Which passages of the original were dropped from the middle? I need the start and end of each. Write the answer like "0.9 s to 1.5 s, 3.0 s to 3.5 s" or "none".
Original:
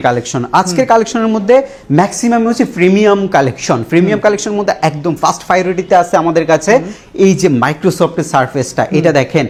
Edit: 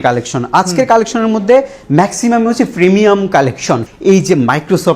3.8 s to 7.0 s